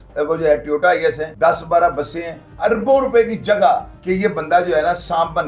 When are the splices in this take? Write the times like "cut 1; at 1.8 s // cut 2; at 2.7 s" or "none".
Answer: cut 1; at 1.3 s // cut 2; at 2.6 s // cut 3; at 3.9 s